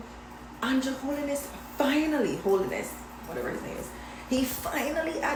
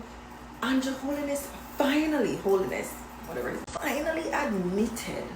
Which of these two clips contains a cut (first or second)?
second